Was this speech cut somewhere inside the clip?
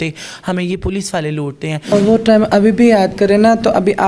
yes; 1 cut; at 1.9 s

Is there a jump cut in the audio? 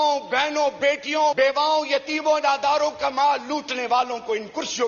yes; 1 cut; at 1.4 s

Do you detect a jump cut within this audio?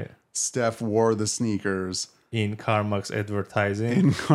no; 0 cuts

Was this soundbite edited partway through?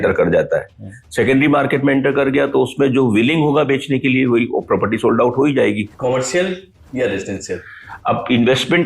yes; 2 cuts; at 5.9 s, 6.7 s

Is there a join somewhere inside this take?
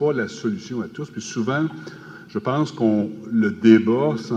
no; 0 cuts

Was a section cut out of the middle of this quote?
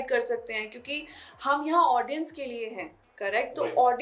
no; 0 cuts

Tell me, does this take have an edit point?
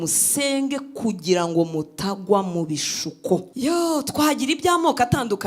yes; 1 cut; at 3.5 s

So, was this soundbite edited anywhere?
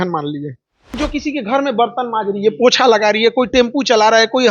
yes; 1 cut; at 1.0 s

